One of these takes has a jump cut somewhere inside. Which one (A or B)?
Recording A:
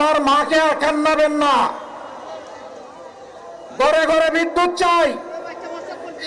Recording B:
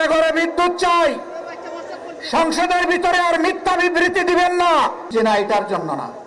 B